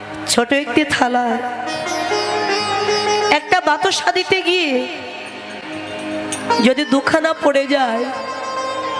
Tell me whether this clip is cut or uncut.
uncut